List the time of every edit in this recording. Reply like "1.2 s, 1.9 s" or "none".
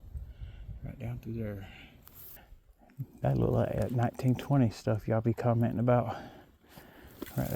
2.5 s